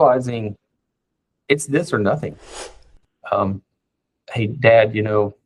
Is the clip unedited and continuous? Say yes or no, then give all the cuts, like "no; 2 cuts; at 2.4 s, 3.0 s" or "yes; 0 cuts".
no; 1 cut; at 2.8 s